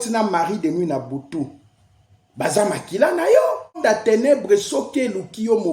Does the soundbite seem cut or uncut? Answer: cut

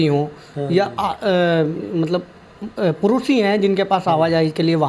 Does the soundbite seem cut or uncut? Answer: uncut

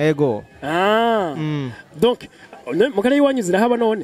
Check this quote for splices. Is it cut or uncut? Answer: uncut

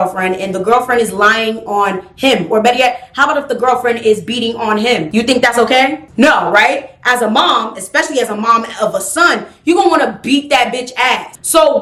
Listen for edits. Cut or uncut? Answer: uncut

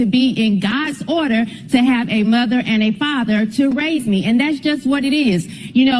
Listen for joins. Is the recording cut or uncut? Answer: uncut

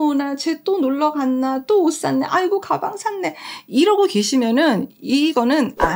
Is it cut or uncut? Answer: uncut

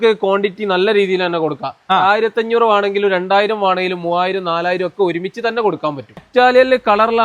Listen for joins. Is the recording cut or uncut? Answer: cut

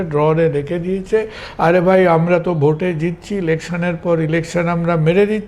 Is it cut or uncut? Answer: uncut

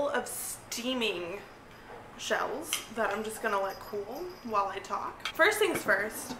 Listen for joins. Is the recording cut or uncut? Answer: cut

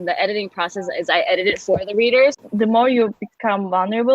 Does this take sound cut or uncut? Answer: cut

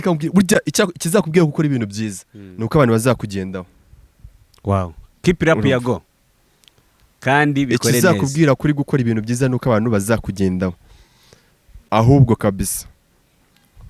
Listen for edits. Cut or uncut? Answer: cut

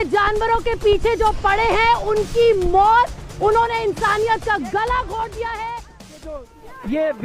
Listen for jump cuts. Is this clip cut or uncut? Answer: cut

